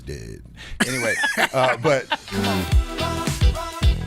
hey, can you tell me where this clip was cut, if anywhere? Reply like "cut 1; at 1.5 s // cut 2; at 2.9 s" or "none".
cut 1; at 2.2 s